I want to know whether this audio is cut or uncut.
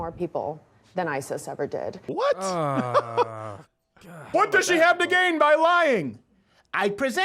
cut